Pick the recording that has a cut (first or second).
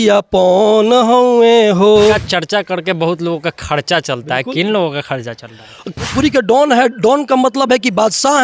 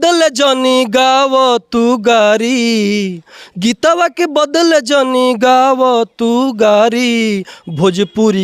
first